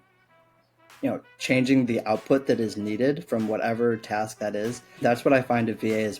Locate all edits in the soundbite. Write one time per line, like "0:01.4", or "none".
0:05.0